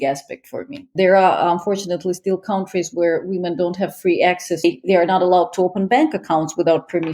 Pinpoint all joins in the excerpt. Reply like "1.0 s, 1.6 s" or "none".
0.9 s, 4.6 s